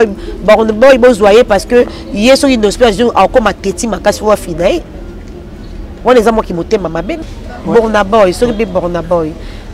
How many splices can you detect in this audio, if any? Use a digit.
1